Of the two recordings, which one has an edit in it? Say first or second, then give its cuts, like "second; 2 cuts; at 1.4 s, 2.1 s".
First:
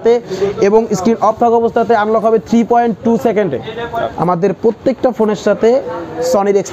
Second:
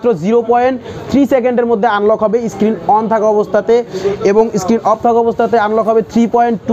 first; 1 cut; at 4.1 s